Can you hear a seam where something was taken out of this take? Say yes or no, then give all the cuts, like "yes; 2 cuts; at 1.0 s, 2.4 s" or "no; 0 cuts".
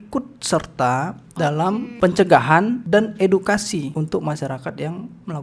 yes; 3 cuts; at 1.9 s, 2.8 s, 3.9 s